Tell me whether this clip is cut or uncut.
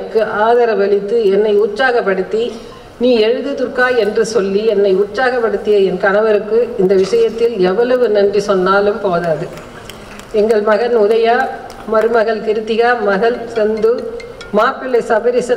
uncut